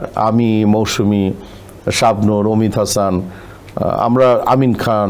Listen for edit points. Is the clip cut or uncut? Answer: uncut